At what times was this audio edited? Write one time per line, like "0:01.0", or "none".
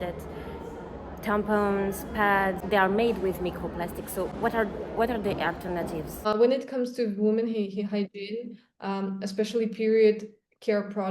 none

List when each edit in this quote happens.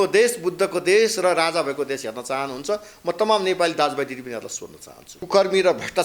0:05.1

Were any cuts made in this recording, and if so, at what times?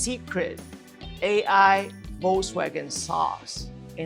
none

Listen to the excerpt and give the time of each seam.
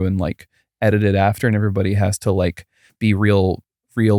0:02.8

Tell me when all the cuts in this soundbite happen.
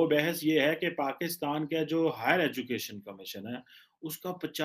none

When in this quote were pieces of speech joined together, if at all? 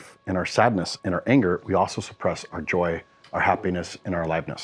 none

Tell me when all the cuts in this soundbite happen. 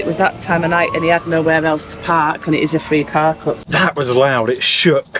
0:03.6

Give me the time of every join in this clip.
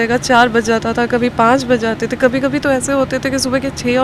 none

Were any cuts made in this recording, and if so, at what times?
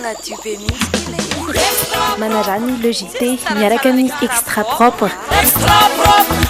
none

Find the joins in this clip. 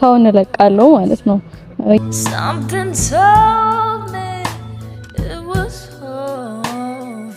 0:02.0

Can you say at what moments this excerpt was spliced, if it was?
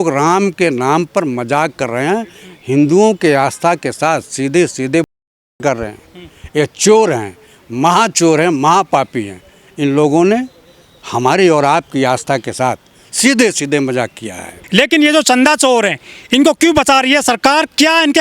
none

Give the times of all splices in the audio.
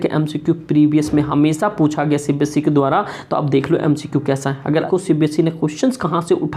0:04.8

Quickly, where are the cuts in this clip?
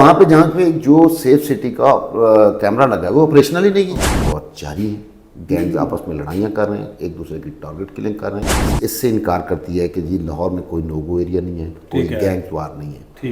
0:04.0
0:08.7

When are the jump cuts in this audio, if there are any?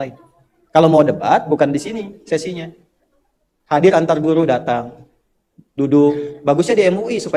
none

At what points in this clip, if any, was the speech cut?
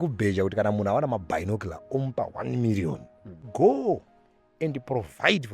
0:03.5

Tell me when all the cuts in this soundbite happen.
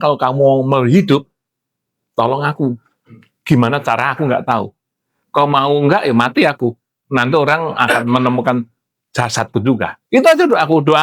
none

